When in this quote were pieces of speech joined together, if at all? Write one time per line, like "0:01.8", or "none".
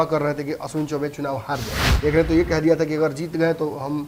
0:01.8